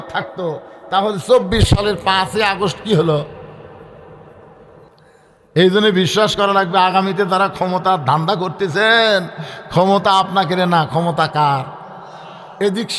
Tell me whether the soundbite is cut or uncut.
cut